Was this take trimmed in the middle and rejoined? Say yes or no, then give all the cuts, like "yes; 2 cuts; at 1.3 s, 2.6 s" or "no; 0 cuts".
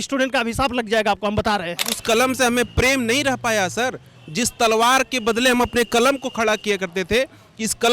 yes; 1 cut; at 1.9 s